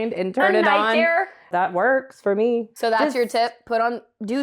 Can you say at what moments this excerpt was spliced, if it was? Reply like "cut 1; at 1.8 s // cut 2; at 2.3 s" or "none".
cut 1; at 1.4 s // cut 2; at 2.7 s